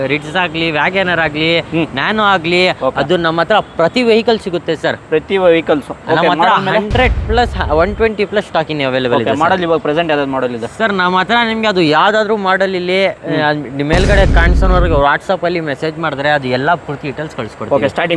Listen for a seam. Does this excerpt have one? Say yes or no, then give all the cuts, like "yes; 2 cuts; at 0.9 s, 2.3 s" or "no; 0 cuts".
no; 0 cuts